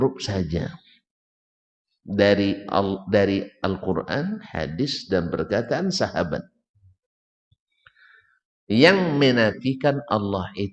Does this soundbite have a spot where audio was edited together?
no; 0 cuts

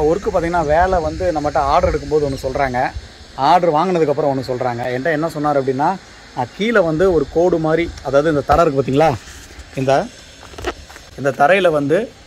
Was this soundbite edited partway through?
no; 0 cuts

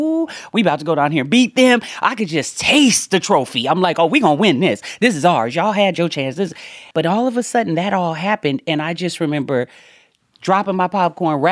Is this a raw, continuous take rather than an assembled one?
no; 1 cut; at 6.8 s

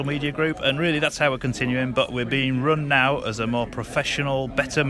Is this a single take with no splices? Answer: yes; 0 cuts

